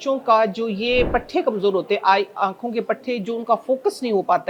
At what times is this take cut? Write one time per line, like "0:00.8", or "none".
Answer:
none